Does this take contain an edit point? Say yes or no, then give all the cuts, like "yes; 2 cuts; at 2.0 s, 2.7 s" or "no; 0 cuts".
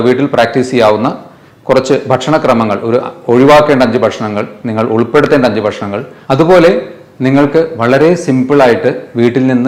no; 0 cuts